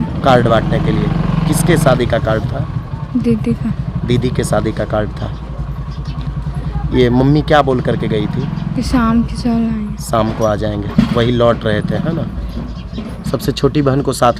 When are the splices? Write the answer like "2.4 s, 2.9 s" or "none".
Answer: none